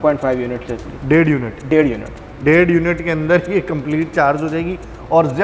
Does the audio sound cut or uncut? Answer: uncut